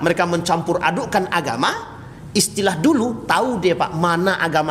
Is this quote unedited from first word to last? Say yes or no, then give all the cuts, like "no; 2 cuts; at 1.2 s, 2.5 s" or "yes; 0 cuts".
yes; 0 cuts